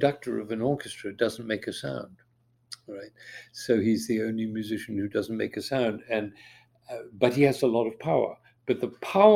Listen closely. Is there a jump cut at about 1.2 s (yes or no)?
no